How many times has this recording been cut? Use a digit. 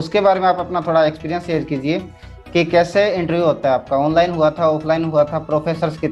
0